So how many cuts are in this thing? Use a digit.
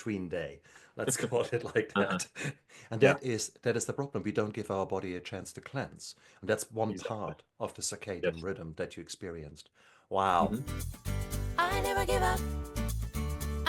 1